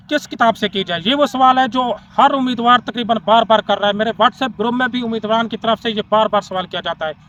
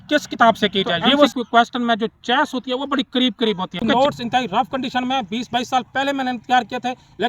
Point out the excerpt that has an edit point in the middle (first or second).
second